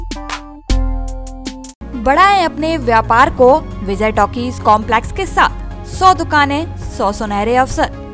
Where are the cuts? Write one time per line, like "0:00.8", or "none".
none